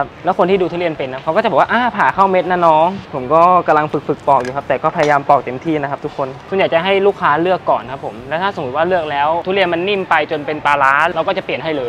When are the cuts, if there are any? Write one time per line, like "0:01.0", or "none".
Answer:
0:03.1
0:06.4